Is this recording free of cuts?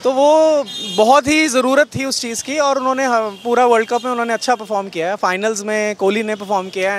yes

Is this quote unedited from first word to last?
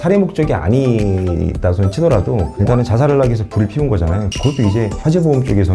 yes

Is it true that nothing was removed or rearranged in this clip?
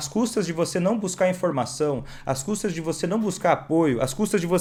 yes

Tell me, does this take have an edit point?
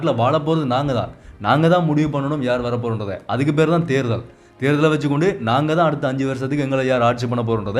no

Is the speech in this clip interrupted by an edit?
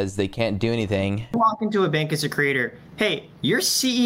yes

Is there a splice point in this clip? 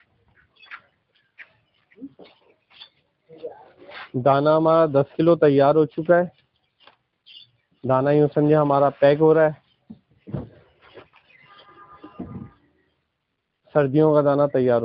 no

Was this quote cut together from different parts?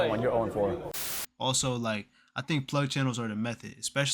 yes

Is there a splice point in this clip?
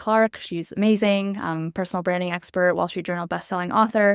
no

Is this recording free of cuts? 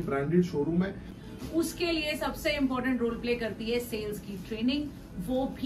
no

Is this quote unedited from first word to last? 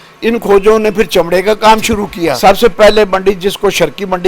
no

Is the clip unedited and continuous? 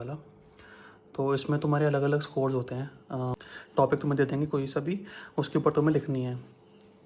no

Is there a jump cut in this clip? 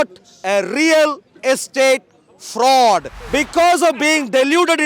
yes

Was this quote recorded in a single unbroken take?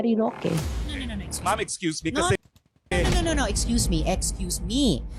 yes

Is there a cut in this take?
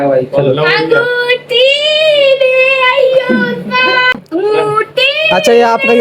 yes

